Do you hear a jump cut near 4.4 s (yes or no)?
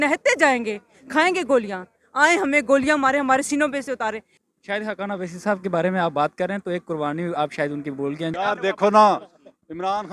yes